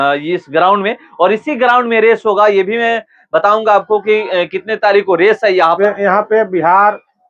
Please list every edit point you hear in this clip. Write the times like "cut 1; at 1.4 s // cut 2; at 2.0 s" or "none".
cut 1; at 5.8 s